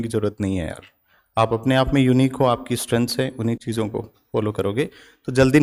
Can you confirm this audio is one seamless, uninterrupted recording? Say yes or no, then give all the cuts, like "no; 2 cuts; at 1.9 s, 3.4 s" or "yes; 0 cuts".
yes; 0 cuts